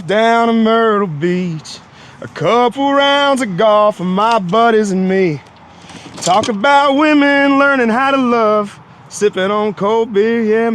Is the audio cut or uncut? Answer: uncut